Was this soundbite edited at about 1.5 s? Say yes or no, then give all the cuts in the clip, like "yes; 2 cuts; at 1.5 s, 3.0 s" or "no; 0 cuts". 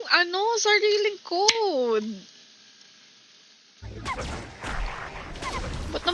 no; 1 cut; at 3.6 s